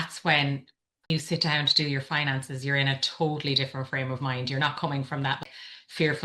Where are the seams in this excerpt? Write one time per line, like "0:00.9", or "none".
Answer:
0:01.1
0:05.4